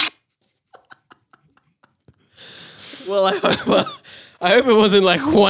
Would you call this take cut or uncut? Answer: uncut